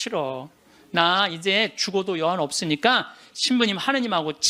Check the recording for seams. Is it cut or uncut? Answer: uncut